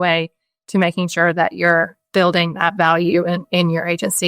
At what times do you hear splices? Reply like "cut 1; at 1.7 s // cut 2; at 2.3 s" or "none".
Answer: none